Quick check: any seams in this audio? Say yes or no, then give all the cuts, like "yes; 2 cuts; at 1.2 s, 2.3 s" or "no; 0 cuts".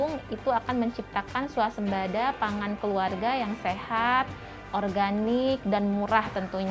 no; 0 cuts